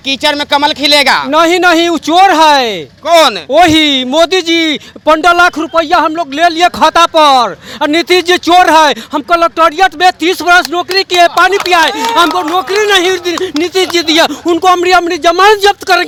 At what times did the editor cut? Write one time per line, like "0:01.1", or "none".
none